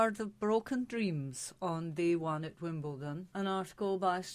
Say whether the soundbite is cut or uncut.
cut